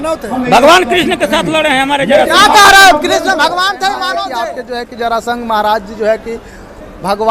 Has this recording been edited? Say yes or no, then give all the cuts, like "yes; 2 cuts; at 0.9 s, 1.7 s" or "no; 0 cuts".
yes; 1 cut; at 4.5 s